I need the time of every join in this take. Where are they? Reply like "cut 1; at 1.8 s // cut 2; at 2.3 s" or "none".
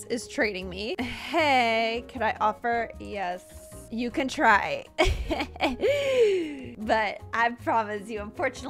none